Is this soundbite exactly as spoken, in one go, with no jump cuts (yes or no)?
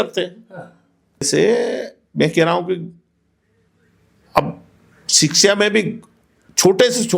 no